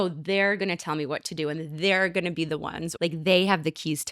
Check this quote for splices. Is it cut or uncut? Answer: cut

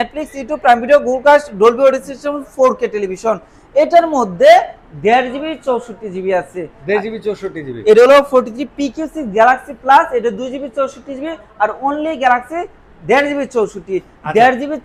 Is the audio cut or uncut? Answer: uncut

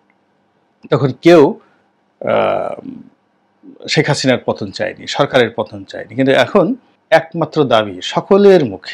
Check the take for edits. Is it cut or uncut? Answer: uncut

